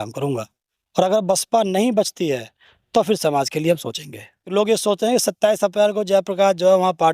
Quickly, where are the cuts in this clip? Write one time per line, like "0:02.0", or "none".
0:04.4